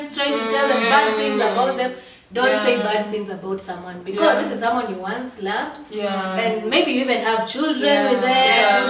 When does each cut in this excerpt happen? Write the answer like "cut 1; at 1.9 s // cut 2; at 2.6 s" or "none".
none